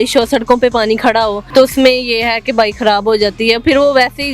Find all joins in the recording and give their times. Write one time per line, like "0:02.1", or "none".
0:01.4